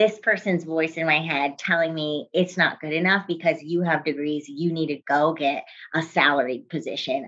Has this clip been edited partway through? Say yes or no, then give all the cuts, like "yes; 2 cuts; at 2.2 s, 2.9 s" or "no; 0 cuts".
no; 0 cuts